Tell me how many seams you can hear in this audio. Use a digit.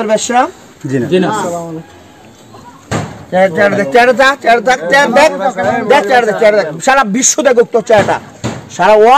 1